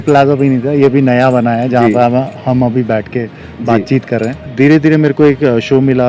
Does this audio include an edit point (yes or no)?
yes